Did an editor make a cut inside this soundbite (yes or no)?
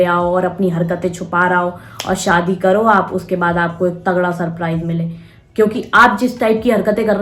no